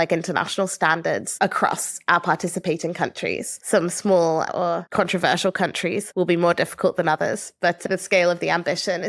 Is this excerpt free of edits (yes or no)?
no